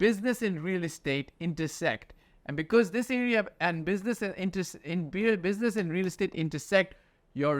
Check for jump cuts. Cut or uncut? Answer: uncut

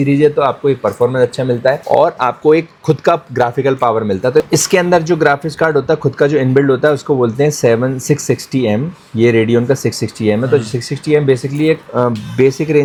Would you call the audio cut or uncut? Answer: uncut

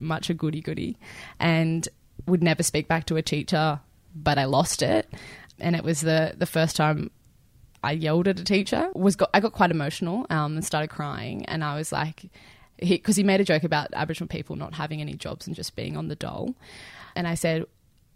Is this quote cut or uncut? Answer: cut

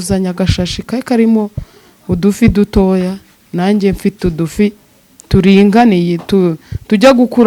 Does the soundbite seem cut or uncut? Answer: uncut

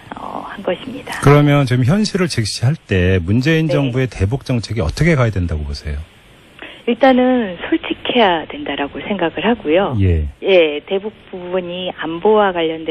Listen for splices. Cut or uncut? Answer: uncut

